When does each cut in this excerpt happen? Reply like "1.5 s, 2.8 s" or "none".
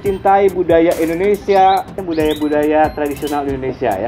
2.0 s